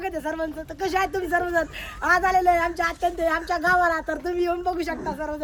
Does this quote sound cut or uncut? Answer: uncut